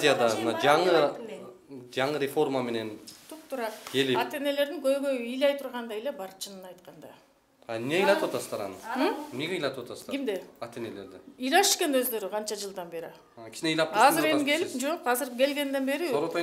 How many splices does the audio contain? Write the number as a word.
zero